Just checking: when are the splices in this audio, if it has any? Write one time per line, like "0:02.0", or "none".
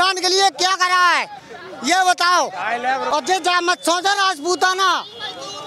0:03.1